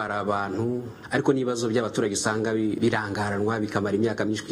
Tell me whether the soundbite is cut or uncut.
cut